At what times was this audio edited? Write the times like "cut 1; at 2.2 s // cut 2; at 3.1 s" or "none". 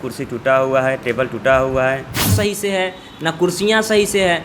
cut 1; at 2.3 s